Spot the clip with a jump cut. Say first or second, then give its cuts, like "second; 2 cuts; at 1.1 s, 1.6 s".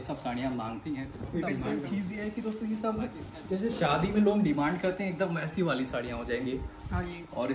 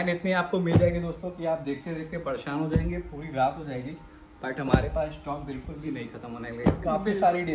first; 1 cut; at 1.7 s